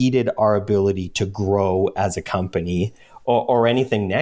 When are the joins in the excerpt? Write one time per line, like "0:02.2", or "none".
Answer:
none